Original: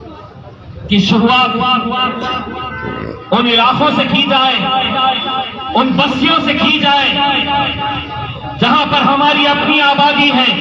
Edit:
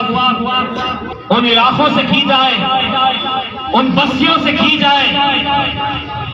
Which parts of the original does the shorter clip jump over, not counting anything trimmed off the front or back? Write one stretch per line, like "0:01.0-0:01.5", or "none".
0:02.6-0:03.1